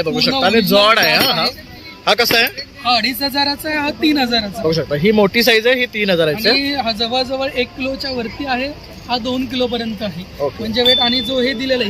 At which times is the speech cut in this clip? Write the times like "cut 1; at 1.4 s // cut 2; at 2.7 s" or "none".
none